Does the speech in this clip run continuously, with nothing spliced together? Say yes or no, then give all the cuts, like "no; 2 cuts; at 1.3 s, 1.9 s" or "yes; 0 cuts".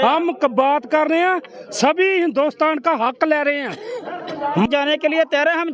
no; 1 cut; at 4.7 s